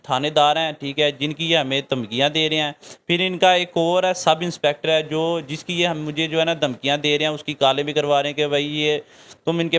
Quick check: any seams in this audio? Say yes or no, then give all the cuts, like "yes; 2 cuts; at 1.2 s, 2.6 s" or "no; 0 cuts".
no; 0 cuts